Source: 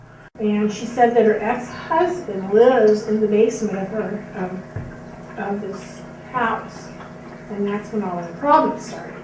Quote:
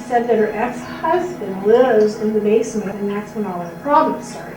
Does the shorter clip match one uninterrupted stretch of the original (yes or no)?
no